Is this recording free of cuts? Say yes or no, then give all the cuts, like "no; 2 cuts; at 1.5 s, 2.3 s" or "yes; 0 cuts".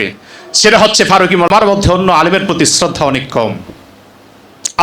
no; 1 cut; at 1.5 s